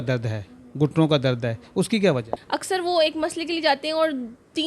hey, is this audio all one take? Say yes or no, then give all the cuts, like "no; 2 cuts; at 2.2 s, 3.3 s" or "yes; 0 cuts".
no; 1 cut; at 2.4 s